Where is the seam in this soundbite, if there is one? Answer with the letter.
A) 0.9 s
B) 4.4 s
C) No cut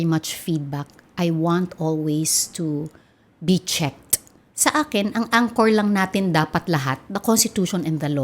B